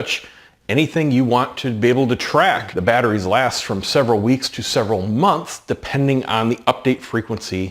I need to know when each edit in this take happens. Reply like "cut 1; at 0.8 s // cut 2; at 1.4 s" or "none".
cut 1; at 2.7 s